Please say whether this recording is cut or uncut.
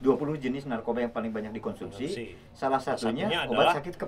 uncut